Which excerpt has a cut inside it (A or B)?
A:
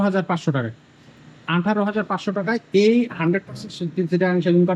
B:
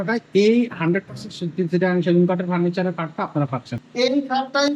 B